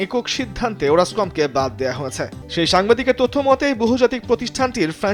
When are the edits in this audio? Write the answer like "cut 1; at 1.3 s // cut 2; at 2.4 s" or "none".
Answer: cut 1; at 2.4 s